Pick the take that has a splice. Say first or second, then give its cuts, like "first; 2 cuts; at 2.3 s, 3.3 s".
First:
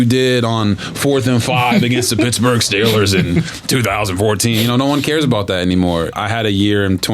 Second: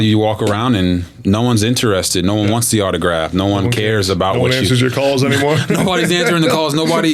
first; 1 cut; at 6.1 s